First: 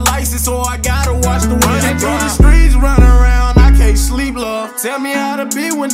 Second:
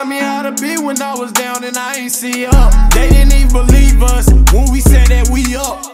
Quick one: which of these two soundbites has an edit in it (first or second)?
first